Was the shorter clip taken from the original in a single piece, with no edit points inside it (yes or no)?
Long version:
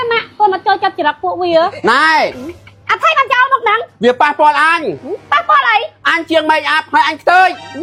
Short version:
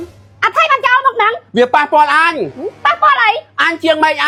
yes